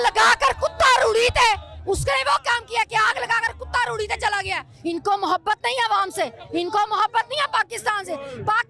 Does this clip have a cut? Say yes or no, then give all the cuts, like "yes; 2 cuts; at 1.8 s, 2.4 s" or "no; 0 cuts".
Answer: yes; 1 cut; at 4.7 s